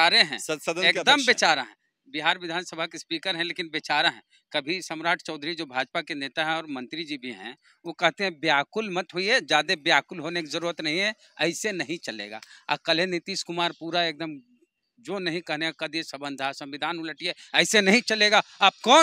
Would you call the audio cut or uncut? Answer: uncut